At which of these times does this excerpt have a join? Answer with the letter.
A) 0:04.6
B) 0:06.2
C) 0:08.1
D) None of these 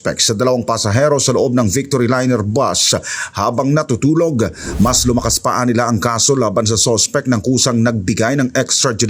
A